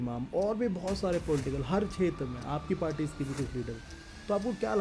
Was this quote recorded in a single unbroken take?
yes; 0 cuts

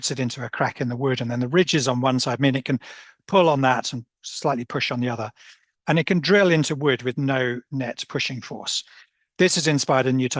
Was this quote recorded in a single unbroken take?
yes; 0 cuts

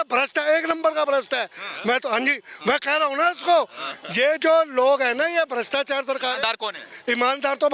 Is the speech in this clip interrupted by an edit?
no; 0 cuts

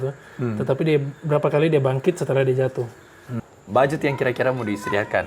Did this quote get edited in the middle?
yes; 1 cut; at 3.4 s

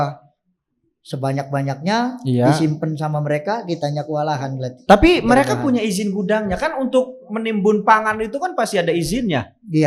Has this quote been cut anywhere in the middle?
no; 0 cuts

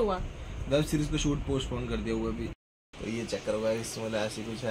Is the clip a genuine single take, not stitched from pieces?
no; 1 cut; at 2.5 s

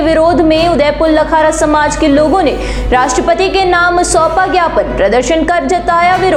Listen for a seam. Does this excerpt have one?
no; 0 cuts

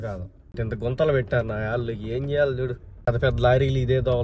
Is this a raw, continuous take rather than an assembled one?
yes; 0 cuts

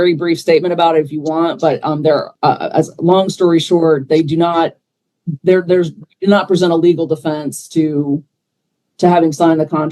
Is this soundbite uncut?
yes; 0 cuts

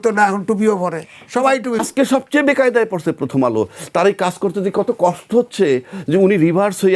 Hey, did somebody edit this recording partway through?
yes; 1 cut; at 1.8 s

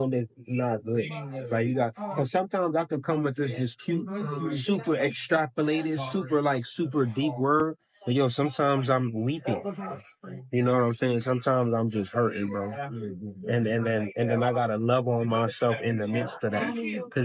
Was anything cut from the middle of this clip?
no; 0 cuts

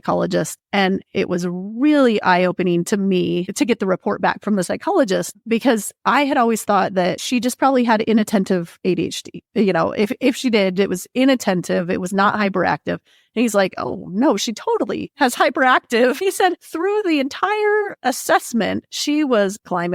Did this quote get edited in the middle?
no; 0 cuts

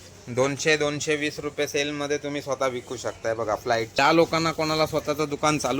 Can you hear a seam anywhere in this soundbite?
yes; 1 cut; at 4.0 s

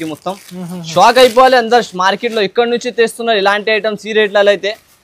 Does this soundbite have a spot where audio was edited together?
no; 0 cuts

